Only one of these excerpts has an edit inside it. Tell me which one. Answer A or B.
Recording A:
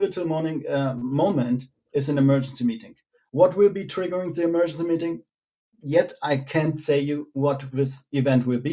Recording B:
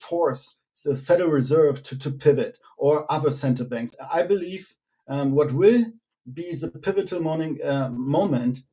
B